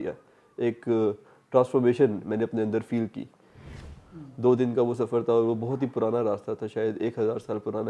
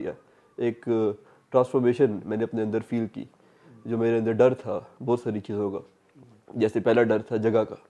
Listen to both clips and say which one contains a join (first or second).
first